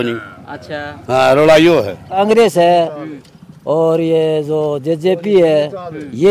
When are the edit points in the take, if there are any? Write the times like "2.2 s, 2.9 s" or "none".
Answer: 2.2 s